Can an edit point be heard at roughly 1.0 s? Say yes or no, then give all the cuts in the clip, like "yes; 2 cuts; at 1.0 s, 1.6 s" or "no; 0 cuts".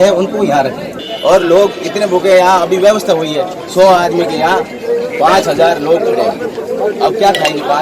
yes; 1 cut; at 1.0 s